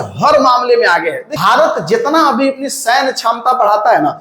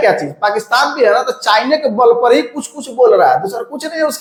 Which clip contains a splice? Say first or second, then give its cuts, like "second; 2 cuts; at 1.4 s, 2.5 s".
first; 1 cut; at 1.3 s